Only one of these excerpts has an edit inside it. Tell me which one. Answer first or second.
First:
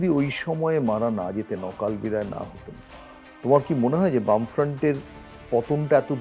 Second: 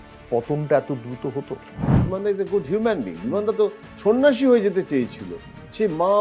second